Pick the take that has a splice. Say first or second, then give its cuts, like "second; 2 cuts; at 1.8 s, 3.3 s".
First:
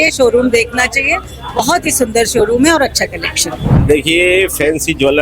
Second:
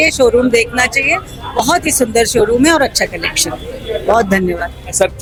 first; 1 cut; at 3.7 s